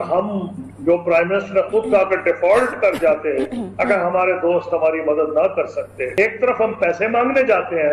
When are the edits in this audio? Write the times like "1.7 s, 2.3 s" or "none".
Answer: 6.1 s